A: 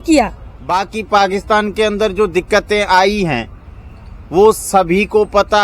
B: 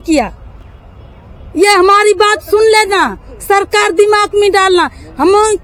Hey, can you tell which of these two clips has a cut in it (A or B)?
A